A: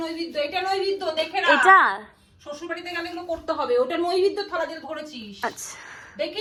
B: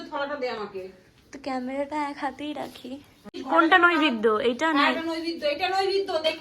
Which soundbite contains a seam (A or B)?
B